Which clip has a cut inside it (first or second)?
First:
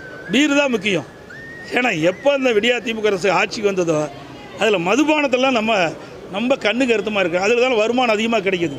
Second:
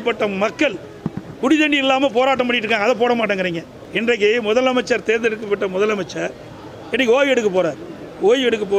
second